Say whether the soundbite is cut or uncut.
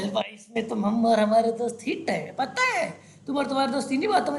uncut